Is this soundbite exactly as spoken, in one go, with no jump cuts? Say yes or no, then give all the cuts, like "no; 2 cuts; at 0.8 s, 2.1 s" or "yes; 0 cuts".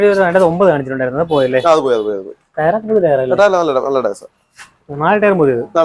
yes; 0 cuts